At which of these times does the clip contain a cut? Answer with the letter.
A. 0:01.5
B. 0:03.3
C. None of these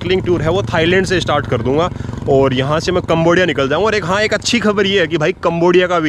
C